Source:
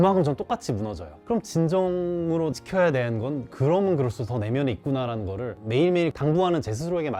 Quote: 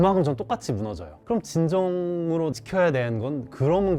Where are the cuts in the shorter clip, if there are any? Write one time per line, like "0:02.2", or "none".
none